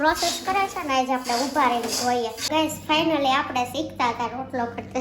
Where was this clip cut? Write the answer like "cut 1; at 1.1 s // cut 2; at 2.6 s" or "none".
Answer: cut 1; at 2.4 s